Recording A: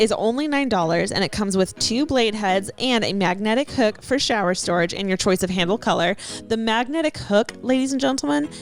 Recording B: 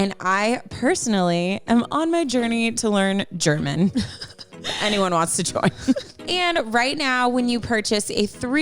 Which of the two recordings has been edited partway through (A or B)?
B